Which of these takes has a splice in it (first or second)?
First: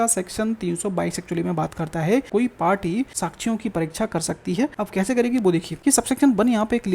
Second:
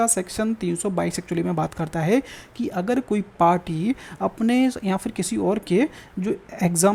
first